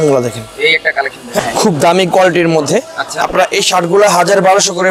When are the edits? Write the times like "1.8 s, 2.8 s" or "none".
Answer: 1.4 s